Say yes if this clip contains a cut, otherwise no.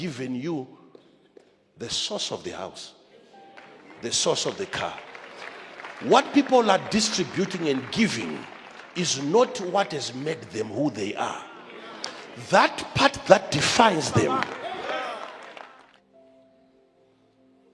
yes